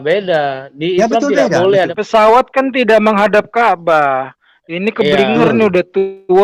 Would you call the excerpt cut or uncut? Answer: cut